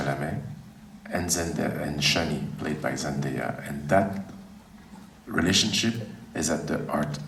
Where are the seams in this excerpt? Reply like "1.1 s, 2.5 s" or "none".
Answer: none